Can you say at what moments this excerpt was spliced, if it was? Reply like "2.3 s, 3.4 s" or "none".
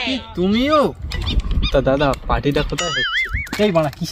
1.1 s